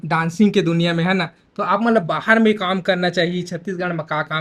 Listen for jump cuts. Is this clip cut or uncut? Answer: uncut